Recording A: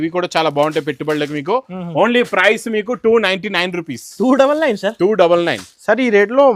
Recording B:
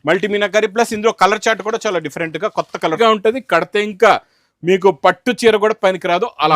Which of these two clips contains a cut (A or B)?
B